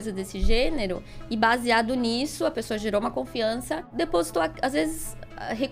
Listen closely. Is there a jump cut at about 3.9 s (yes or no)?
yes